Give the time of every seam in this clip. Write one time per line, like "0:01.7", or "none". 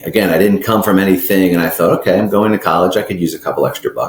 none